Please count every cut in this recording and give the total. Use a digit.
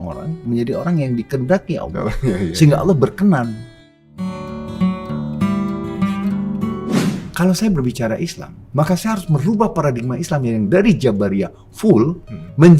1